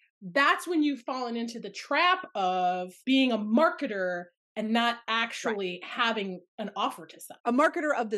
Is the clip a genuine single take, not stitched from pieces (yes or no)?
yes